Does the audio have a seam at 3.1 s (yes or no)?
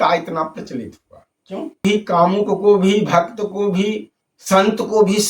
no